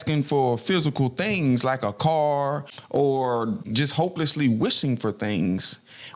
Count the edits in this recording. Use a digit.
2